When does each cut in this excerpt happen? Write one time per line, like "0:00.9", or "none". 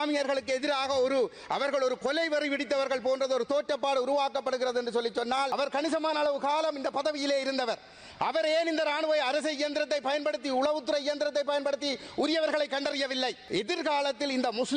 0:05.5
0:13.4